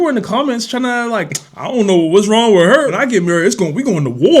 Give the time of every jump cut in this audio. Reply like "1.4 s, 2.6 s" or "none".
2.9 s